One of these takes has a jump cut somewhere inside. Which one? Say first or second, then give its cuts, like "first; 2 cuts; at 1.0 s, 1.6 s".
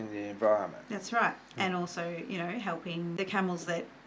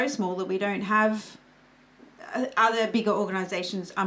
first; 1 cut; at 3.2 s